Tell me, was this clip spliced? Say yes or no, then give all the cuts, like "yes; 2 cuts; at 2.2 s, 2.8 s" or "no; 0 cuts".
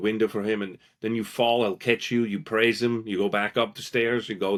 no; 0 cuts